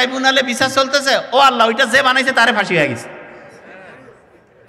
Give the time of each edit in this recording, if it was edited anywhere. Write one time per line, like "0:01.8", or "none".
none